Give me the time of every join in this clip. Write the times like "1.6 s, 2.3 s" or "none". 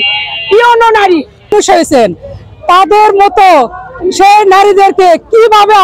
1.5 s